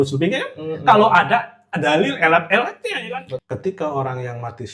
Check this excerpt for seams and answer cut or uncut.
cut